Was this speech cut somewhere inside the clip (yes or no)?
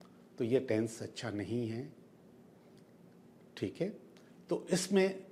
no